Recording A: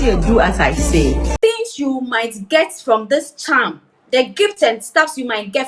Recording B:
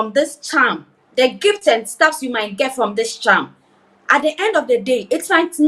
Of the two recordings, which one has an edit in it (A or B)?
A